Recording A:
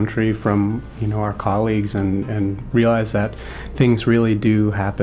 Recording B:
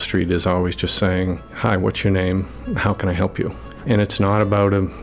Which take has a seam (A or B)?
B